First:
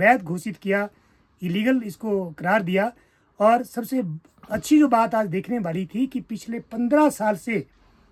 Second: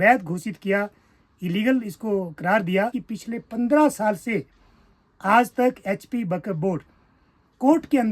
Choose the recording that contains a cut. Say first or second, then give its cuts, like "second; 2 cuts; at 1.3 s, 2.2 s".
second; 1 cut; at 3.0 s